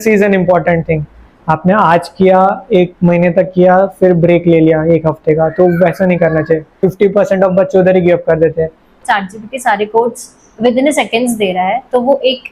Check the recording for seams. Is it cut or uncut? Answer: cut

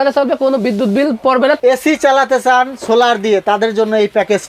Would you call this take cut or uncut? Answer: cut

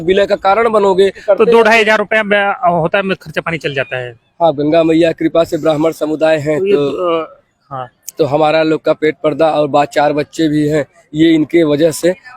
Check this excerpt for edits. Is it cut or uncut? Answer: cut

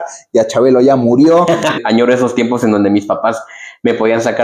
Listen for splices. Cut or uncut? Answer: cut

